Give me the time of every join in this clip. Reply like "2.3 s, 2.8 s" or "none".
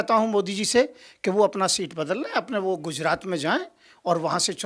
none